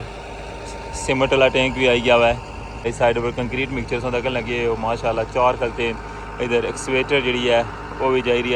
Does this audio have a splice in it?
yes; 1 cut; at 2.8 s

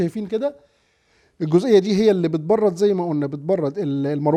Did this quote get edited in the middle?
no; 0 cuts

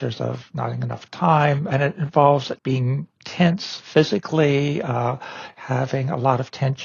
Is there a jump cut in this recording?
yes; 2 cuts; at 1.7 s, 2.5 s

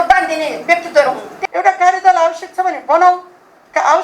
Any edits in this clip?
yes; 1 cut; at 1.3 s

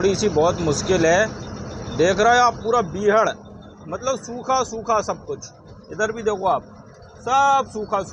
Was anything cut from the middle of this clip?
no; 0 cuts

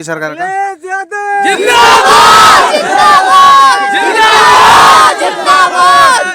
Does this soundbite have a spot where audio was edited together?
no; 0 cuts

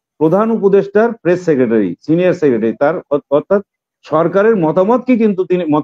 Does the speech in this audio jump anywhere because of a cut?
no; 0 cuts

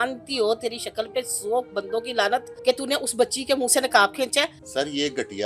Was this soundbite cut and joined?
yes; 2 cuts; at 2.5 s, 4.6 s

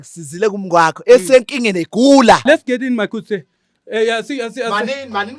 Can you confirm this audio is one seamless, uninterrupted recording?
no; 1 cut; at 2.4 s

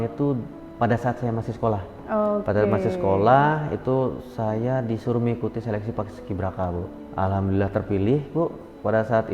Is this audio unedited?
no; 1 cut; at 7.0 s

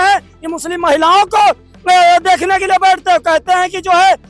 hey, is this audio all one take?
yes; 0 cuts

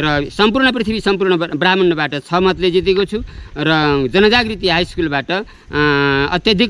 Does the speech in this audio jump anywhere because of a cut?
no; 0 cuts

